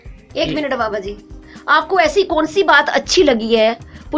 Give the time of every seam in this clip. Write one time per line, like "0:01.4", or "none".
none